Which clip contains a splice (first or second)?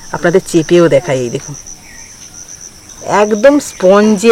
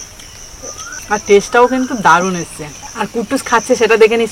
first